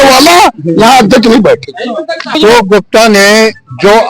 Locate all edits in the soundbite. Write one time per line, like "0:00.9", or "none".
0:02.4